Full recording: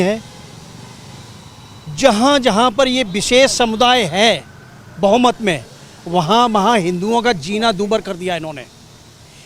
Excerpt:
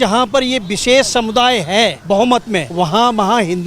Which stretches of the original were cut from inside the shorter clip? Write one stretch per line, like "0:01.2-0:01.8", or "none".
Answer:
0:04.4-0:04.9
0:05.6-0:06.0